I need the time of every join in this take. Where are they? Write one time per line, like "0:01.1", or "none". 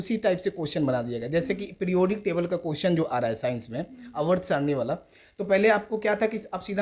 none

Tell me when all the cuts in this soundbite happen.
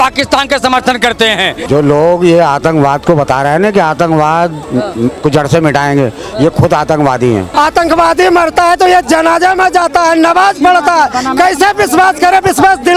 0:01.6
0:07.5

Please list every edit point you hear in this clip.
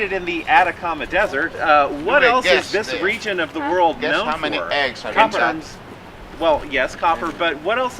0:06.9

